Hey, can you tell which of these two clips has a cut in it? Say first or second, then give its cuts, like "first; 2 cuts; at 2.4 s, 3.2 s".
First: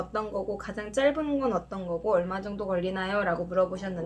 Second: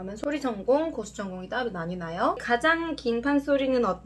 second; 1 cut; at 2.4 s